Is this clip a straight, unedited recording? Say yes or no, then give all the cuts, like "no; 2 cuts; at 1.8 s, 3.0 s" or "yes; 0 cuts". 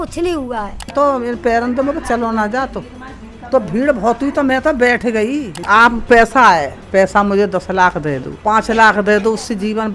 no; 3 cuts; at 0.9 s, 5.6 s, 8.3 s